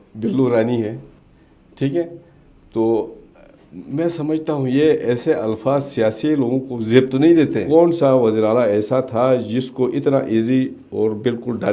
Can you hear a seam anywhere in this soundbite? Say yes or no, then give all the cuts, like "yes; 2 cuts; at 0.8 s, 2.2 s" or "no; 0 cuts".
yes; 2 cuts; at 1.1 s, 7.6 s